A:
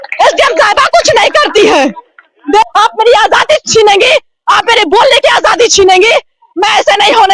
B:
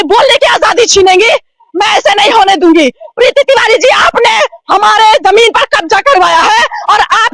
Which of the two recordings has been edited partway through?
A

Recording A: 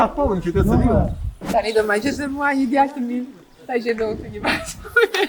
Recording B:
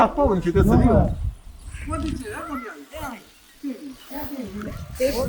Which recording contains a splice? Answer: A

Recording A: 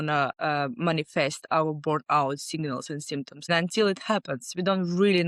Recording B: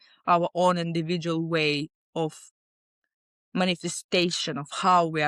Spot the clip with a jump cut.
A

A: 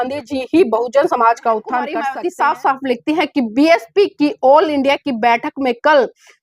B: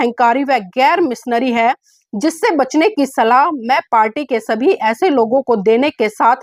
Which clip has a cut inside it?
A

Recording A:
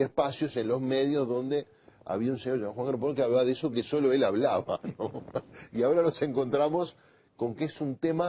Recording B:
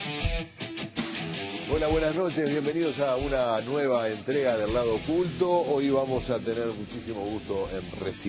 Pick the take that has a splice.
A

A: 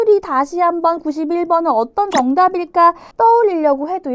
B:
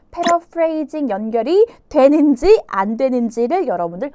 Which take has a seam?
A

